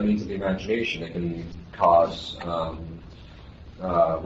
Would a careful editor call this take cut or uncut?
uncut